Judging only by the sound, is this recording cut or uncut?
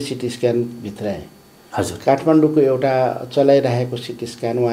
uncut